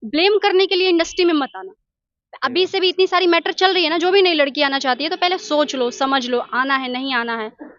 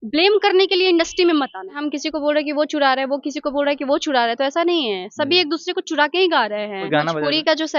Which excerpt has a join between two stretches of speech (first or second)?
second